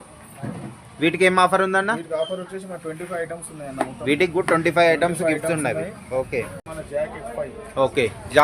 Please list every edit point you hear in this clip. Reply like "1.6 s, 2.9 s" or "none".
6.6 s